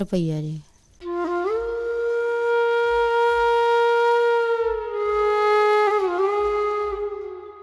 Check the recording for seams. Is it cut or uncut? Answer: cut